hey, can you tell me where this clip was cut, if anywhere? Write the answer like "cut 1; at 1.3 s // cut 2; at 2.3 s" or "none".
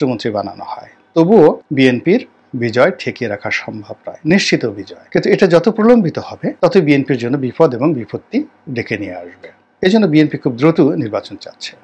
none